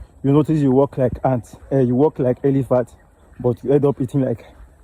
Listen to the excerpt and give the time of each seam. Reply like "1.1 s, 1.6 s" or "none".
none